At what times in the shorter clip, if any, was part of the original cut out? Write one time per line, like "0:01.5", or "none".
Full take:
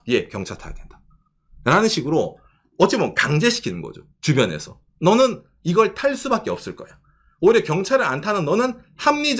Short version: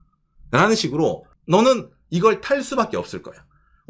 0:01.3

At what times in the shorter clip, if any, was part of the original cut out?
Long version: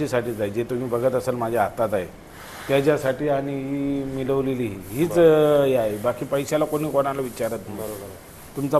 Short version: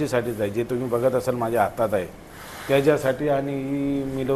none

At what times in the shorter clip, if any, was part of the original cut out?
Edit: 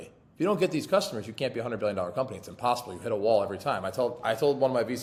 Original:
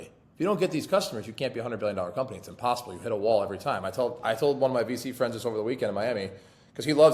none

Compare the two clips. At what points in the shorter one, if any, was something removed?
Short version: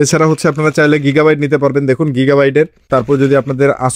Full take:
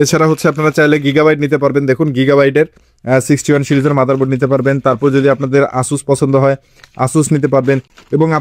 0:02.9

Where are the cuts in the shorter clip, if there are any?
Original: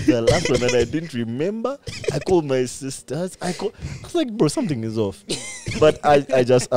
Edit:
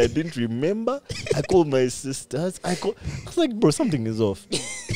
none

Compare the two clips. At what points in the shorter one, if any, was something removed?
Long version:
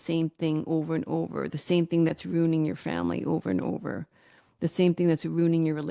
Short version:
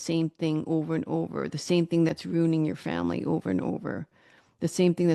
none

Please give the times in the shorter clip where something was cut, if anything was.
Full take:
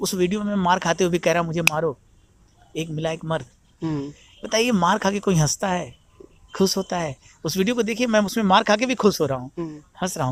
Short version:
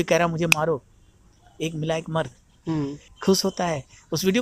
0:03.0

